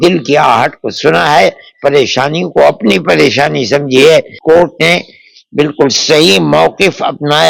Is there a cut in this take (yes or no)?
yes